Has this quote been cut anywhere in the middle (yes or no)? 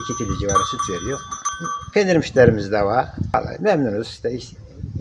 yes